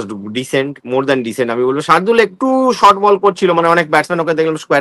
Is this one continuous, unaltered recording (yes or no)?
yes